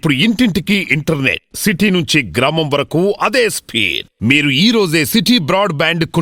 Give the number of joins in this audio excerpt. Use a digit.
0